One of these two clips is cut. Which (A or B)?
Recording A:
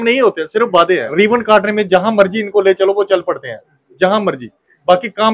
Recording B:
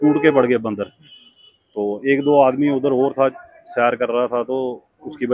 A